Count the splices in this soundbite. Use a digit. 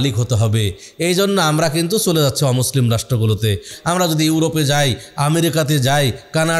1